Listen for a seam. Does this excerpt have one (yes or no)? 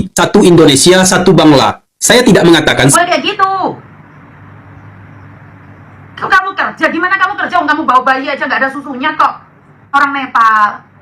yes